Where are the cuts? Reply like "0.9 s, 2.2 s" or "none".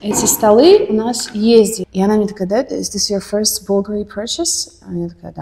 1.8 s